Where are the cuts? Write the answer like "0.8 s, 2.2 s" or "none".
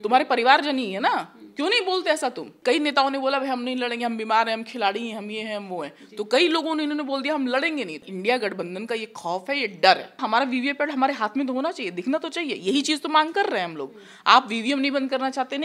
2.5 s, 8.0 s, 10.2 s